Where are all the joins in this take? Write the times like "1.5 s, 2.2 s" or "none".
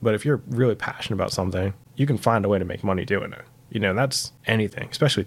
1.8 s, 4.3 s